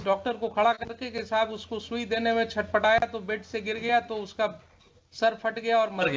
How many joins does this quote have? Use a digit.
0